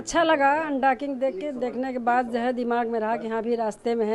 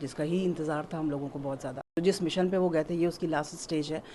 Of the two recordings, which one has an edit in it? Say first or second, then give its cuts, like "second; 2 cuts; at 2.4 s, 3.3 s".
second; 1 cut; at 2.0 s